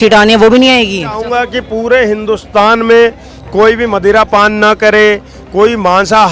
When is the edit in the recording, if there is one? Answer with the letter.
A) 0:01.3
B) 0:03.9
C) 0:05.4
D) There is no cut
A